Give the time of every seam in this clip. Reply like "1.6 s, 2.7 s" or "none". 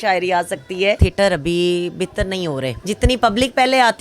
1.0 s, 2.8 s